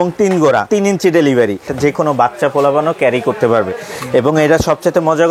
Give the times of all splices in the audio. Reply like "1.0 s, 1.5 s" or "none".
1.7 s